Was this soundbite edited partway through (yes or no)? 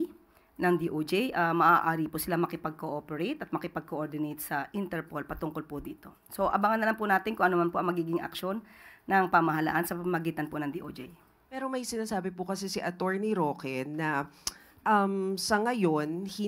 no